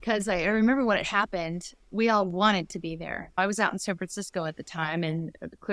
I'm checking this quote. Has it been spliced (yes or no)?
yes